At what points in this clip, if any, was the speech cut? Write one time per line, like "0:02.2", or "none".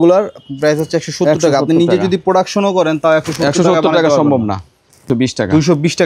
0:05.1